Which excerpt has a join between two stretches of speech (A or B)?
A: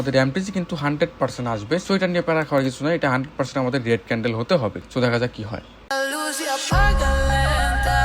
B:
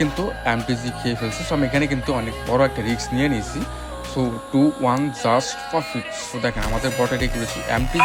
A